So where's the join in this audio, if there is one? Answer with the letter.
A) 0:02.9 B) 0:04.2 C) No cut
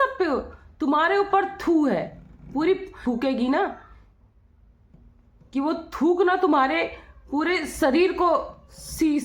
A